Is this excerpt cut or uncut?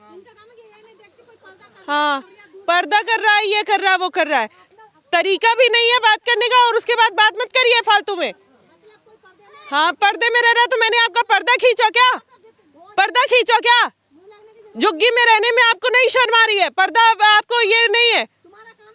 uncut